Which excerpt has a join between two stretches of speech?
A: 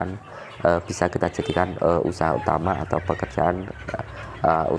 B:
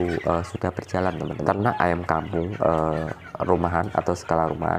B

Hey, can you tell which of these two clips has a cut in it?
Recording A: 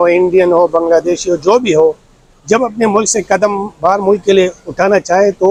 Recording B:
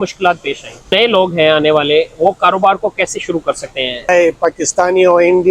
B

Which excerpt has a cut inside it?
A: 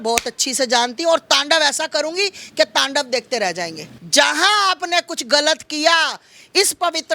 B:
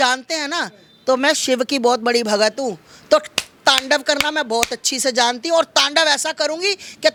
A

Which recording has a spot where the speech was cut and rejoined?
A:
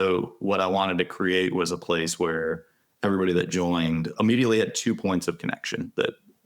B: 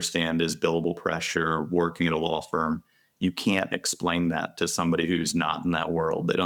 A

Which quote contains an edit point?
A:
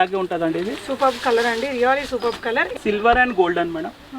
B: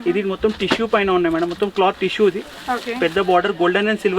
A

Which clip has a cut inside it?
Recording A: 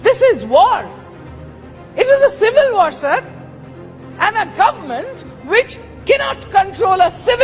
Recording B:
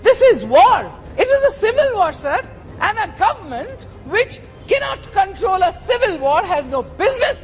B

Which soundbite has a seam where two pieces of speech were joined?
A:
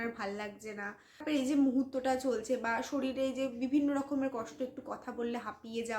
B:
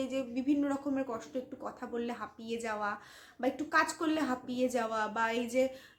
A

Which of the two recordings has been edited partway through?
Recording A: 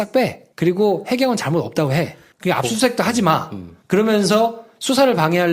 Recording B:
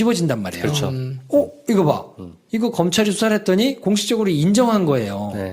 B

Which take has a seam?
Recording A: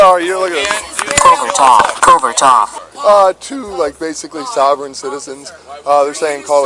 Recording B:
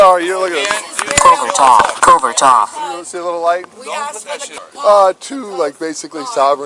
A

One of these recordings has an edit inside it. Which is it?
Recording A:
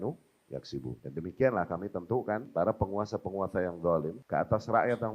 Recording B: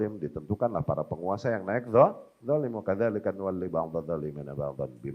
A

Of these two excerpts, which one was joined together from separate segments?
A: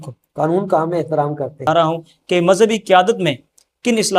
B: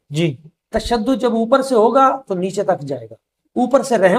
A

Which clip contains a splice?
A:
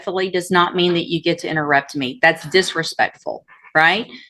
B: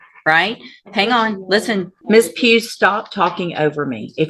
B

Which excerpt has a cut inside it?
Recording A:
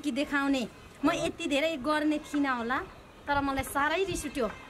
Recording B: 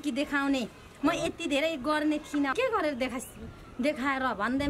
B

